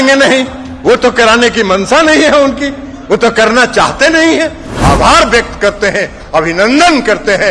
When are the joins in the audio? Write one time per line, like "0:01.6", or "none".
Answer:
0:04.7